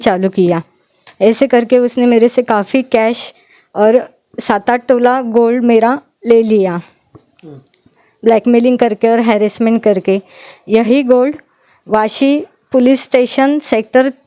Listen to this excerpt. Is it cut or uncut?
uncut